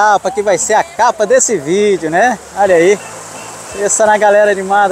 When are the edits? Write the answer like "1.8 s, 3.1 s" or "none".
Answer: none